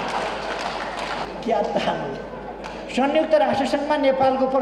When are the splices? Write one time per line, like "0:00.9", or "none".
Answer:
0:01.3